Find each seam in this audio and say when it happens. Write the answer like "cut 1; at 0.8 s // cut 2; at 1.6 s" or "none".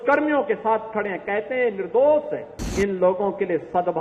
cut 1; at 2.7 s